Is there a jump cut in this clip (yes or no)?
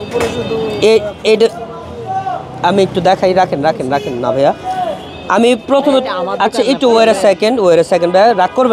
no